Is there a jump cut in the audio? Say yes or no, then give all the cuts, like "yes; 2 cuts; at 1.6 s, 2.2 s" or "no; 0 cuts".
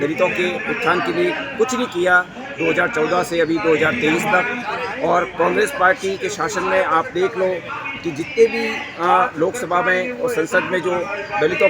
no; 0 cuts